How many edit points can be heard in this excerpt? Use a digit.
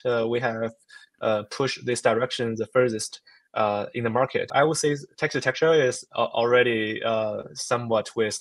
1